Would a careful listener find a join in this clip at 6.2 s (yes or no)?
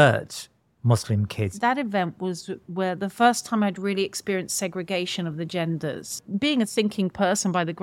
yes